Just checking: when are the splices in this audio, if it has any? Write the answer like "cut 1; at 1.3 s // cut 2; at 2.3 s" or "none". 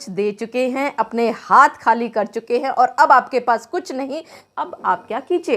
cut 1; at 4.4 s